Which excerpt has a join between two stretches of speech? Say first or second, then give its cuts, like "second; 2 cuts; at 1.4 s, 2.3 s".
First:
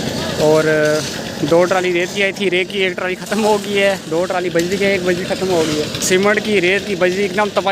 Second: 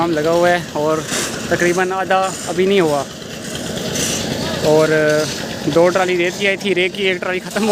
first; 1 cut; at 6.0 s